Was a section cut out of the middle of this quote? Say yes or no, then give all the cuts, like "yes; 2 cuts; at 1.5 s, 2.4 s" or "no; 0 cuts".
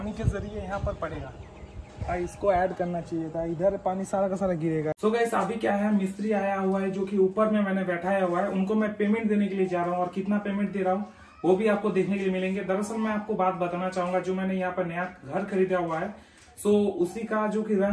yes; 1 cut; at 4.9 s